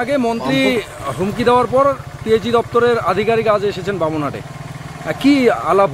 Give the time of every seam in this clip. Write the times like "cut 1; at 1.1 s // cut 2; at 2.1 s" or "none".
none